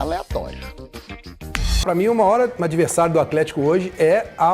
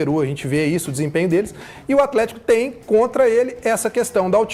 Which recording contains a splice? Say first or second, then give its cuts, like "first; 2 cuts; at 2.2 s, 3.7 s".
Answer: first; 1 cut; at 1.8 s